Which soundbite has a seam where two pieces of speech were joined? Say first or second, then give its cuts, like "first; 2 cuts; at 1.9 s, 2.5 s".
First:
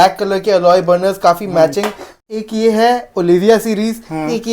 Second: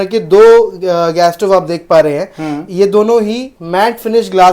first; 1 cut; at 2.1 s